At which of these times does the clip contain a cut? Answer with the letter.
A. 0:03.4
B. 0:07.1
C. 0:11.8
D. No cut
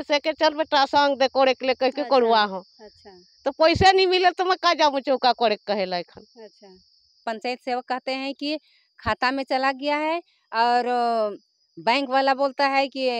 B